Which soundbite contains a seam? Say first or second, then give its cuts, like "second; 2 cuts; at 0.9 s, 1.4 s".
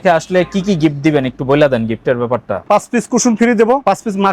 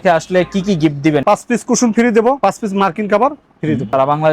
second; 1 cut; at 1.2 s